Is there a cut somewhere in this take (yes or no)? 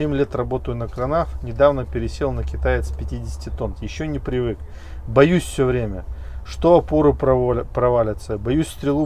yes